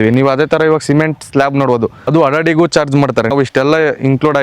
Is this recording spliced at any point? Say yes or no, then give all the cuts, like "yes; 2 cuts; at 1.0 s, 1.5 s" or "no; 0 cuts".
yes; 2 cuts; at 2.0 s, 3.3 s